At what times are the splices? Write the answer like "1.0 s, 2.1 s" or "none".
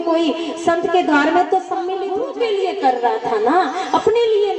2.0 s

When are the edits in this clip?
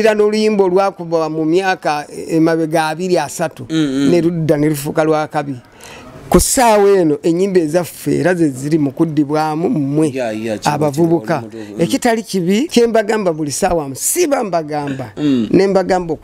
12.7 s

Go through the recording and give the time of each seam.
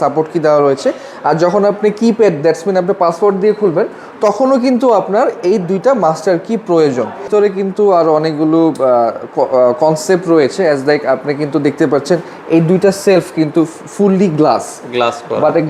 7.3 s

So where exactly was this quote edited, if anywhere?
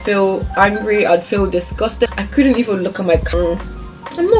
2.2 s, 3.3 s

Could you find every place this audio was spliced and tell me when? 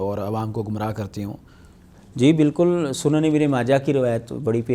none

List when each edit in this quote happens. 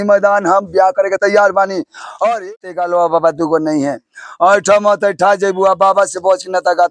2.4 s

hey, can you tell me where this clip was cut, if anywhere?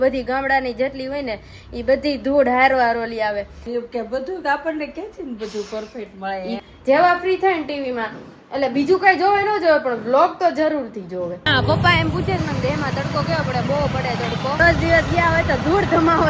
3.6 s, 6.6 s, 11.4 s, 14.6 s

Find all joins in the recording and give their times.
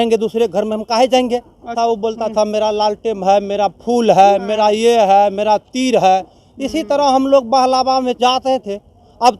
1.6 s

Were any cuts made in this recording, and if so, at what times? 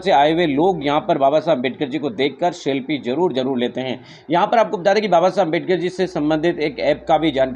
none

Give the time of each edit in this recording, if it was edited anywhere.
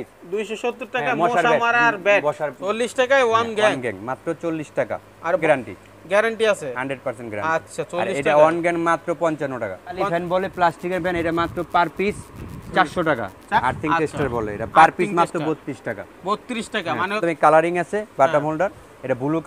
2.5 s, 5.4 s, 10.0 s, 13.4 s, 17.2 s

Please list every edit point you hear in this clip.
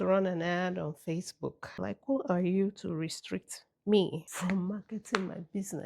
1.7 s

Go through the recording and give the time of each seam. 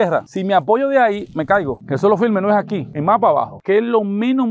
1.7 s, 3.5 s

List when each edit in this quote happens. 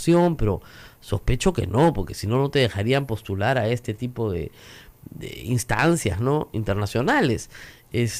none

